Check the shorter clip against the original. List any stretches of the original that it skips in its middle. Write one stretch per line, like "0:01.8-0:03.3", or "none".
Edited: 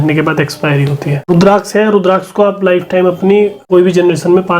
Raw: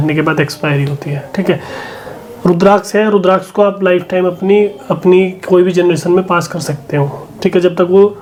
0:01.3-0:02.5
0:04.8-0:05.4